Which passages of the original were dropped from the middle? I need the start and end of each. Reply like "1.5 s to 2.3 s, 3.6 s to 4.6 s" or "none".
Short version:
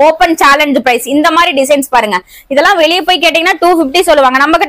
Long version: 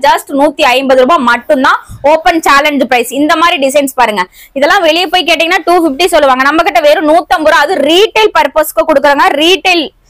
none